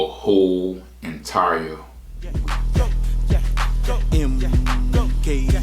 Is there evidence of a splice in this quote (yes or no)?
yes